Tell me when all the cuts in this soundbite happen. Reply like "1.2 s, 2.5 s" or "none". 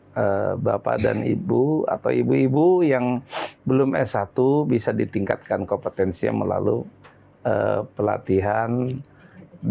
none